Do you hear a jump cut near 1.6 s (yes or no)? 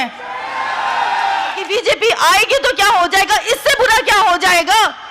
yes